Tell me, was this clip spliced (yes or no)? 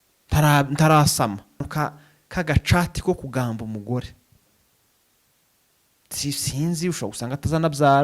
yes